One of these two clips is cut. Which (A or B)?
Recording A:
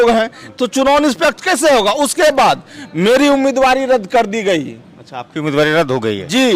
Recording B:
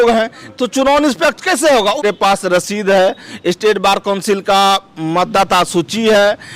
B